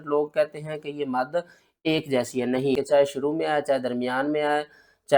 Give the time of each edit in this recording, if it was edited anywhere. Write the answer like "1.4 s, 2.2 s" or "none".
2.8 s

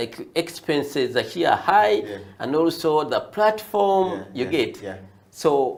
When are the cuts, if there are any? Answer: none

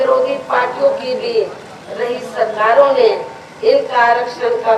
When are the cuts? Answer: none

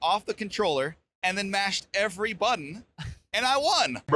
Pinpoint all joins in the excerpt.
none

